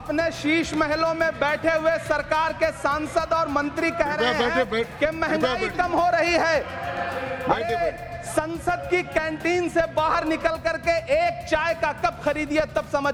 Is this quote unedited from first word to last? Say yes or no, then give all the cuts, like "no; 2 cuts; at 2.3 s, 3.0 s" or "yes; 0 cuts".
yes; 0 cuts